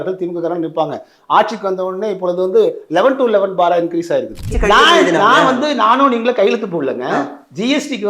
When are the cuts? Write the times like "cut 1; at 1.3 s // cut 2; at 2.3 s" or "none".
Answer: cut 1; at 4.5 s

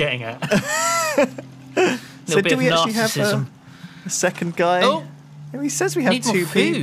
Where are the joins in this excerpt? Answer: cut 1; at 2.2 s

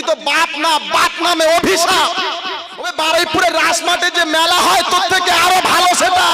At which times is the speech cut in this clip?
cut 1; at 2.8 s

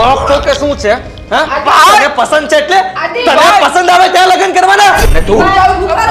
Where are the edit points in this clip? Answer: cut 1; at 5.0 s

